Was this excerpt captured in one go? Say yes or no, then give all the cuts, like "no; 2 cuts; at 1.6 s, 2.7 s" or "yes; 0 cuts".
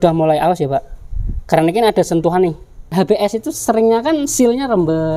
no; 1 cut; at 2.9 s